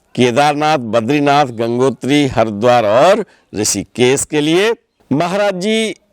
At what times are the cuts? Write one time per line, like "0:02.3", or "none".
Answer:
0:04.9